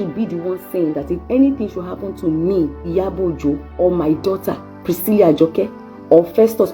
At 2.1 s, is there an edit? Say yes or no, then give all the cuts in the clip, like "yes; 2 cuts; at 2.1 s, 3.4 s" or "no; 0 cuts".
no; 1 cut; at 3.3 s